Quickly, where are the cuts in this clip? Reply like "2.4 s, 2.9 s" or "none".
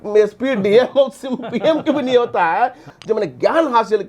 2.9 s